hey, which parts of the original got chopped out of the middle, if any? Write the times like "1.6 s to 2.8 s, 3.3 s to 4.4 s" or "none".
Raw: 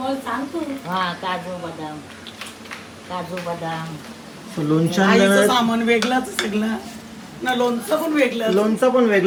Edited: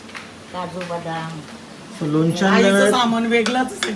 none